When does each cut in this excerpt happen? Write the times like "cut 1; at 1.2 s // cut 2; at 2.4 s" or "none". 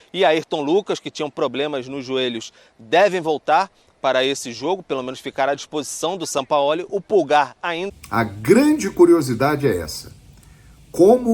cut 1; at 7.8 s